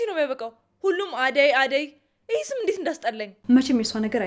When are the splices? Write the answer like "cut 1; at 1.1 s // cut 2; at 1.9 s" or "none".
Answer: cut 1; at 3.3 s